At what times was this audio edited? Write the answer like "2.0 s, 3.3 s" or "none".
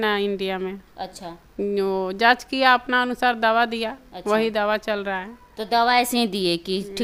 none